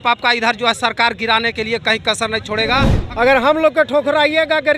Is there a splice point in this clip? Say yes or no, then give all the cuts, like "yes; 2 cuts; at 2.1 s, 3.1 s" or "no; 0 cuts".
yes; 1 cut; at 2.9 s